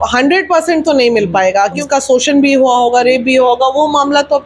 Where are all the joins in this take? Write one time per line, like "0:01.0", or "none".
0:01.8